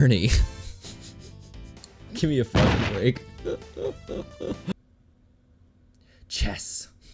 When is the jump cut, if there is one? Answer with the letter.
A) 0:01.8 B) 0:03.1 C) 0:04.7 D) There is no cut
C